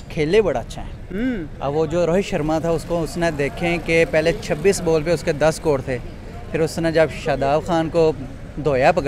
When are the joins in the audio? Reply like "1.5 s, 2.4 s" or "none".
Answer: none